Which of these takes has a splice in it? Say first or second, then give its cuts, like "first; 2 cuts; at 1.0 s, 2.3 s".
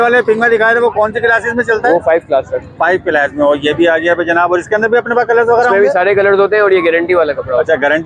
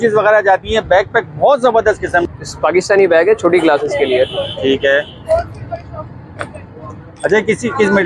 second; 1 cut; at 2.3 s